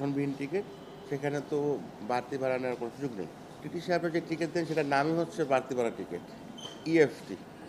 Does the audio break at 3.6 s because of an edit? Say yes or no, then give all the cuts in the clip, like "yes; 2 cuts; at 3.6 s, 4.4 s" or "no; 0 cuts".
yes; 1 cut; at 3.6 s